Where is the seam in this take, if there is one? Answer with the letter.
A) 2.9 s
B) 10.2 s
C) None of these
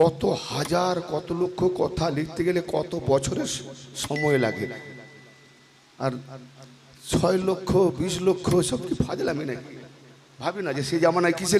C